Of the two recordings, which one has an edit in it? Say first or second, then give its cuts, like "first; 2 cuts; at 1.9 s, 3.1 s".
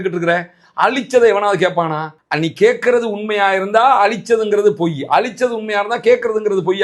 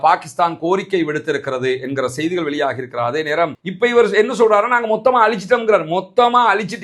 second; 1 cut; at 3.6 s